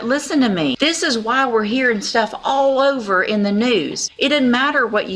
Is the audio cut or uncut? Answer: cut